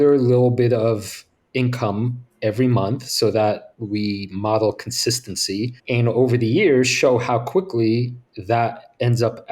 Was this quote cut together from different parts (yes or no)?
yes